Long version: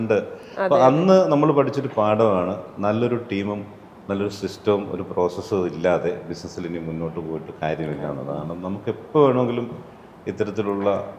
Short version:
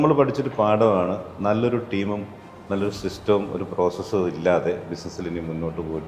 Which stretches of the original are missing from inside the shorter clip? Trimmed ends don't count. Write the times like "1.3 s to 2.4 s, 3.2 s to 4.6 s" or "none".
none